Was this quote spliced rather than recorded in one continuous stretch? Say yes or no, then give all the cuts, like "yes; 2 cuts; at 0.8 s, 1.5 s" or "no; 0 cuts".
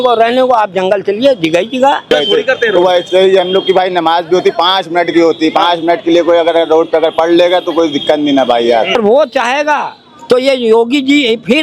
yes; 2 cuts; at 2.1 s, 8.9 s